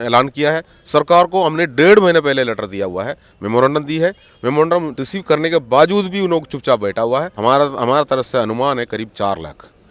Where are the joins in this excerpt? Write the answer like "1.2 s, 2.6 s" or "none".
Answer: 7.4 s